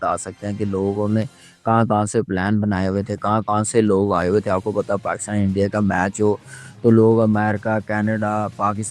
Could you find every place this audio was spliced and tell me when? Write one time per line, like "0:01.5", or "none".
none